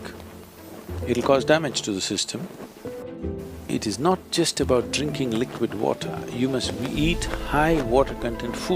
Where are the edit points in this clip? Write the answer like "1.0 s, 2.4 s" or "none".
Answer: 3.0 s